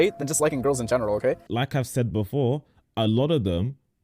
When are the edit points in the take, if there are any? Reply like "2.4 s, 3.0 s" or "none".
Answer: 1.5 s